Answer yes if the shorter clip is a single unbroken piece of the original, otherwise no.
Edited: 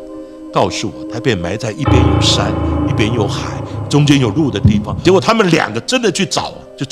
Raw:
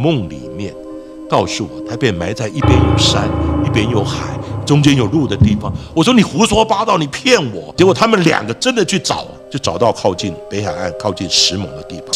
no